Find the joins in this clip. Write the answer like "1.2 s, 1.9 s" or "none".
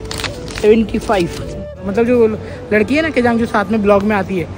1.8 s